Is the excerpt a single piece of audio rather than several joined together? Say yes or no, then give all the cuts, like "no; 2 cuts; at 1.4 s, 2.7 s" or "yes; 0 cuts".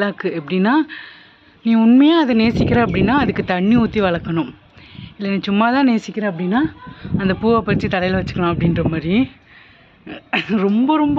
yes; 0 cuts